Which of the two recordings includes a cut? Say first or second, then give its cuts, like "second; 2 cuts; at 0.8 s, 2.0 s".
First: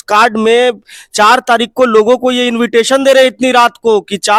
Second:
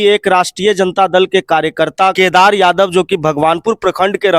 second; 1 cut; at 2.1 s